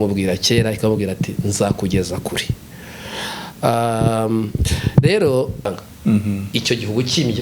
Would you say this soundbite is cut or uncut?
cut